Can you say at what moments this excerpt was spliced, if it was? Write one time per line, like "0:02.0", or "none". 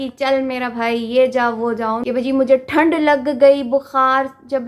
0:02.0